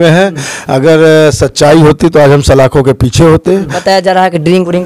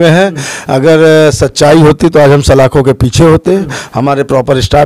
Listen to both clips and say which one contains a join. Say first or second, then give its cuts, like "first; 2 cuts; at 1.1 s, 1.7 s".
first; 1 cut; at 3.7 s